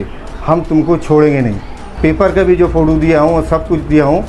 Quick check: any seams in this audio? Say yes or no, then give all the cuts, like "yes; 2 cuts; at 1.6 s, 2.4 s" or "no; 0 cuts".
yes; 1 cut; at 1.8 s